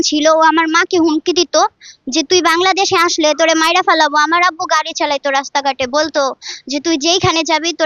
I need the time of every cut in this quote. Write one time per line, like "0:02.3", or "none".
none

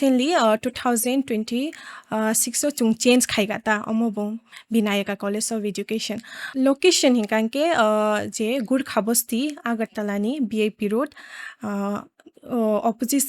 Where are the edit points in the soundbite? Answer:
0:06.5

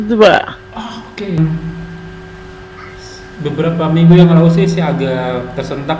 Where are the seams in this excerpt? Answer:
0:01.4

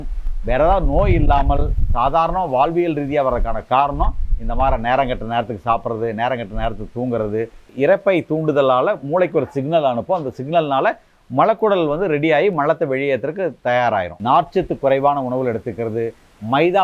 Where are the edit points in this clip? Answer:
0:07.6
0:14.1

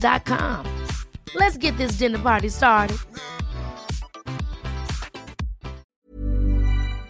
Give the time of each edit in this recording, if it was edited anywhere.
0:05.9

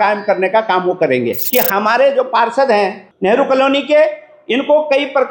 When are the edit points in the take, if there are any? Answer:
0:01.4
0:03.0

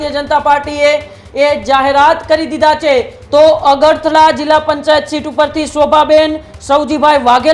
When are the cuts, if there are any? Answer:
0:03.2

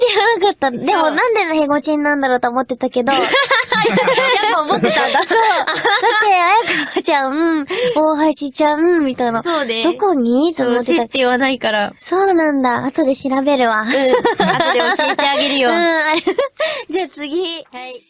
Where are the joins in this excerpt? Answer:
0:08.1

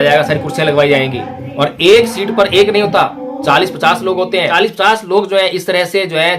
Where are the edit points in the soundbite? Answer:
0:04.5

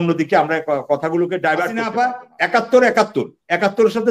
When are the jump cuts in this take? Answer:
0:01.8

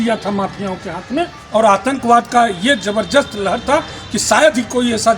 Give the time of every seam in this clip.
0:01.4

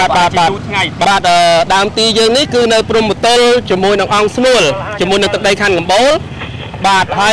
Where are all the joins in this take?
0:01.0

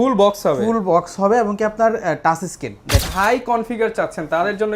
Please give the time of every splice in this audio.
0:03.1

